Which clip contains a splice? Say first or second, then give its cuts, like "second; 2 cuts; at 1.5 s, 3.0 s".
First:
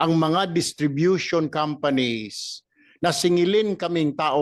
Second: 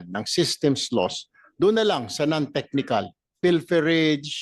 second; 1 cut; at 3.4 s